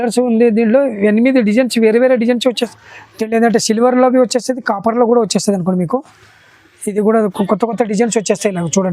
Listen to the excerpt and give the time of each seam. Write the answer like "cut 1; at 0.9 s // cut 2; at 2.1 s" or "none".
cut 1; at 2.6 s

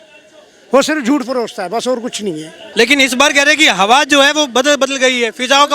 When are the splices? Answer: cut 1; at 2.6 s

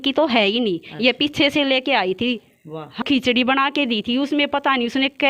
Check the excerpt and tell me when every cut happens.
cut 1; at 3.0 s

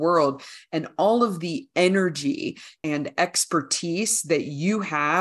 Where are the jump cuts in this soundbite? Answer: cut 1; at 2.7 s

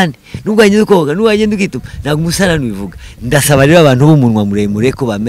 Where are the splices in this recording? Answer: none

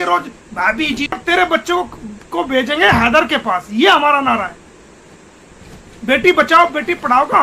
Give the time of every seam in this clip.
cut 1; at 1.2 s

